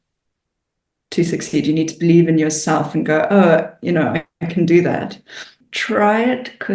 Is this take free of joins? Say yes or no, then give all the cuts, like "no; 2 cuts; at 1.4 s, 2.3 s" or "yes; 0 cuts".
no; 1 cut; at 5.6 s